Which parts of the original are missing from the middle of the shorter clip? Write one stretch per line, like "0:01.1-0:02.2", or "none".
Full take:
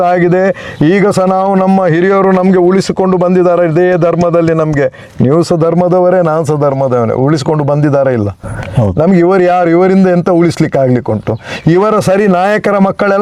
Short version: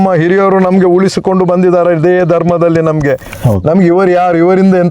0:05.0-0:08.6